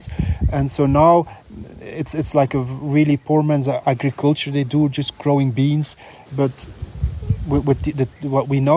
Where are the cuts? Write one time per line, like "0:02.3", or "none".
0:03.8
0:06.1